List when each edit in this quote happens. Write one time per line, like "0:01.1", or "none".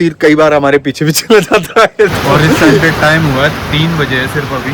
0:02.8